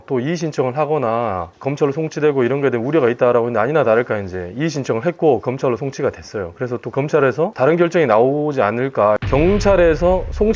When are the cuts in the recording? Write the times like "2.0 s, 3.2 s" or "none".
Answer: 1.5 s, 7.5 s, 9.2 s